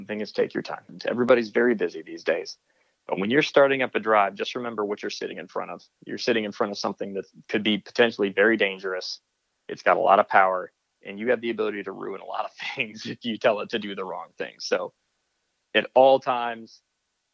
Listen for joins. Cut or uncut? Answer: cut